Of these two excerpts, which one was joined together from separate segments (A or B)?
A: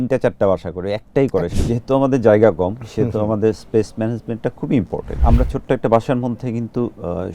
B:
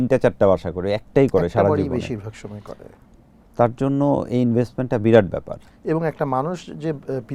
A